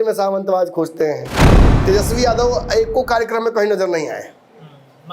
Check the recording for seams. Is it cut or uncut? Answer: cut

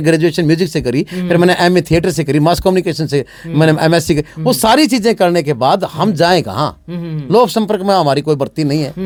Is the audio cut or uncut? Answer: uncut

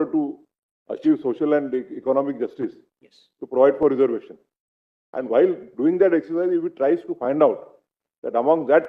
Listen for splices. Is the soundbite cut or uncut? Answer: uncut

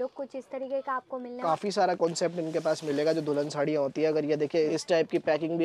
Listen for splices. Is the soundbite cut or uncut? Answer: cut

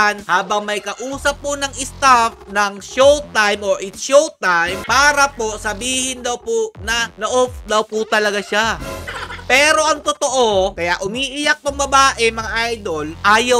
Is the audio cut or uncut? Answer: uncut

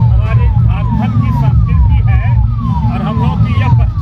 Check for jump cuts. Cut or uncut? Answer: uncut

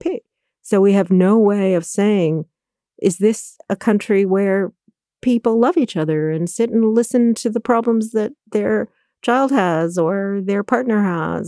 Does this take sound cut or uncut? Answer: uncut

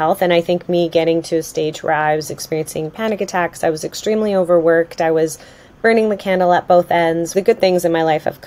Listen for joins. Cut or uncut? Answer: cut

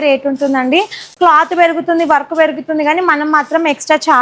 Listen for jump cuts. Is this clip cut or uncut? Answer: uncut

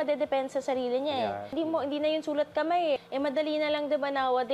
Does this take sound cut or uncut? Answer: cut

